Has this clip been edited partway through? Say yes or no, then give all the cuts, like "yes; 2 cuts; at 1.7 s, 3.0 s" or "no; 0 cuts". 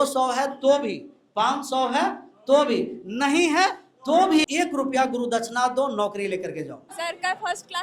yes; 2 cuts; at 4.4 s, 6.9 s